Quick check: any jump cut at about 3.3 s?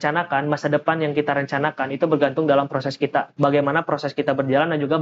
yes; 1 cut; at 3.3 s

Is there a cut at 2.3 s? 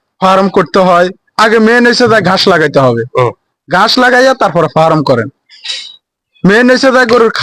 no; 0 cuts

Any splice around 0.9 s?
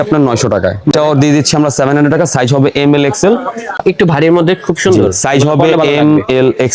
yes; 2 cuts; at 0.9 s, 3.8 s

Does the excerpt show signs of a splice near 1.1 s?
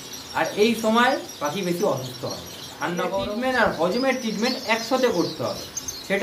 no; 1 cut; at 3.1 s

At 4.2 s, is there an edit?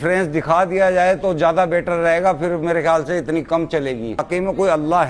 yes; 1 cut; at 4.2 s

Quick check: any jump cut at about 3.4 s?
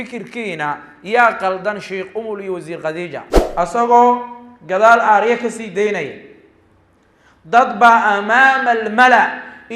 yes; 1 cut; at 3.4 s

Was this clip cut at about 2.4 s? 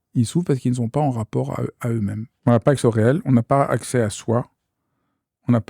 yes; 1 cut; at 2.4 s

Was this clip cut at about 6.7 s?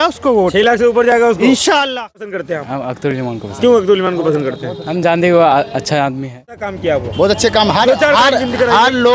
yes; 2 cuts; at 2.3 s, 6.7 s

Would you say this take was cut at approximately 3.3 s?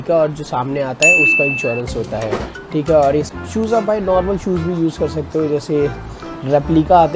yes; 1 cut; at 3.3 s

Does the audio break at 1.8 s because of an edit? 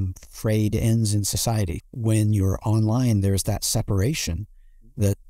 yes; 1 cut; at 1.8 s

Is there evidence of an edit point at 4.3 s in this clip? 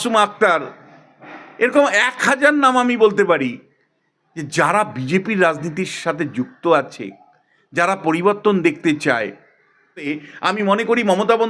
no; 1 cut; at 10.1 s

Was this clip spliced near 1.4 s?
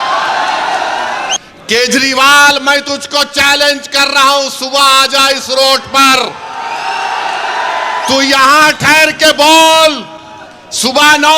yes; 1 cut; at 1.4 s

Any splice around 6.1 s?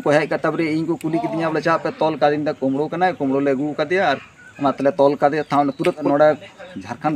yes; 1 cut; at 6.1 s

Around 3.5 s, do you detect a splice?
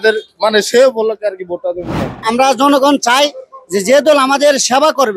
no; 1 cut; at 2.2 s

